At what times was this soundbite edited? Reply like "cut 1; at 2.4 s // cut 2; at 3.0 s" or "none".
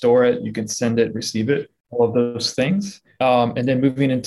cut 1; at 1.8 s // cut 2; at 3.0 s